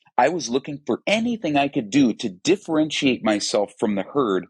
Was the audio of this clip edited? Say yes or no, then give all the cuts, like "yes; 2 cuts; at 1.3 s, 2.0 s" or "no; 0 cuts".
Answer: yes; 1 cut; at 1.0 s